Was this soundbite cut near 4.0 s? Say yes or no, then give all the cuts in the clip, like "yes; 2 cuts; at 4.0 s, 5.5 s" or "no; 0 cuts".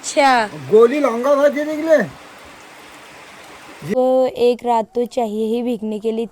yes; 1 cut; at 4.0 s